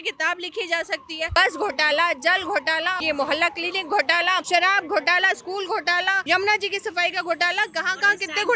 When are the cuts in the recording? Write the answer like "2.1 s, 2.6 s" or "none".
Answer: 1.3 s, 3.0 s, 4.4 s, 6.2 s